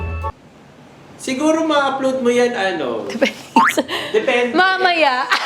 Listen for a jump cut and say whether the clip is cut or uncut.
uncut